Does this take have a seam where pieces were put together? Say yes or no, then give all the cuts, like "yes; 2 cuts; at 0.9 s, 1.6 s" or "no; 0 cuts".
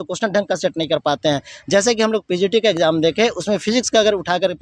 no; 0 cuts